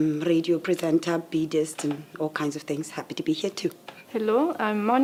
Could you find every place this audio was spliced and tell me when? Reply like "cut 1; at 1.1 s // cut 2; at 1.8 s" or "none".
none